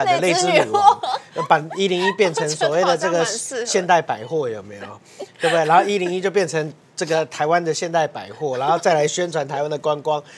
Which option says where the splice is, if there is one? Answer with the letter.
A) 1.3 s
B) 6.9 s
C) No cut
C